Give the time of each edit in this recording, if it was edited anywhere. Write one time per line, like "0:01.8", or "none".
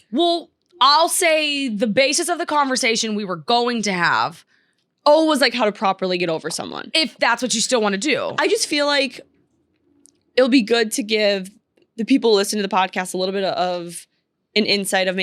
0:08.3

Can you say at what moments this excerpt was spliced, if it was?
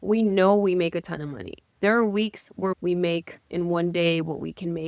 0:02.8

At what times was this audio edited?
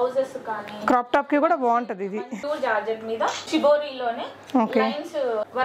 0:02.3
0:03.4

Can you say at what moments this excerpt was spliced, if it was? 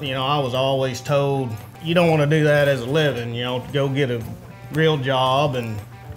0:01.7

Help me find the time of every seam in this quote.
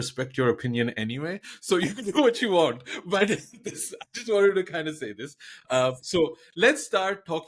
none

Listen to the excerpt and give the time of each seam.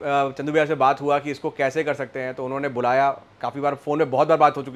none

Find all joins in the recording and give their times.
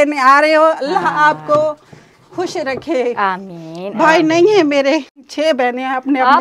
0:05.3

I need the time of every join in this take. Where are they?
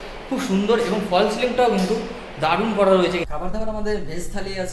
0:03.3

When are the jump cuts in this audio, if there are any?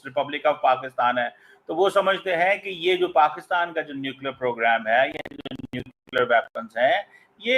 none

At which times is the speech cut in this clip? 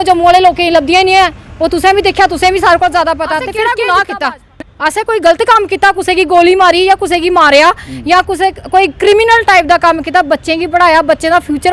0:03.5

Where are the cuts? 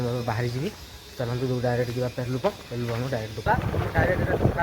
0:03.5

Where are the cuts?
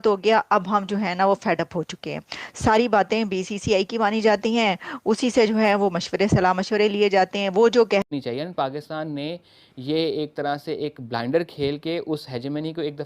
0:08.1

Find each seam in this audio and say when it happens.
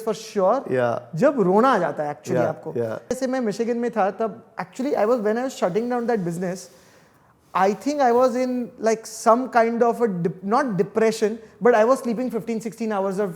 0:03.1

